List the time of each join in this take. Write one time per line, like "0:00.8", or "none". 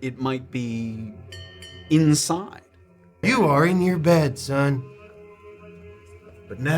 0:03.2